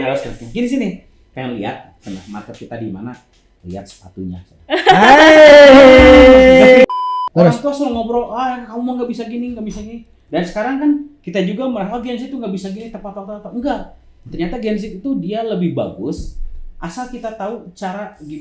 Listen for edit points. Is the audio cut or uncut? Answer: cut